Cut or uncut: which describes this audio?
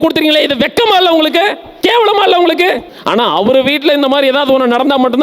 cut